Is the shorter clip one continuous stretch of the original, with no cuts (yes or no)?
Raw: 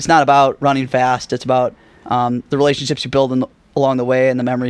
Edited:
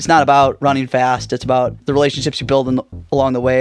no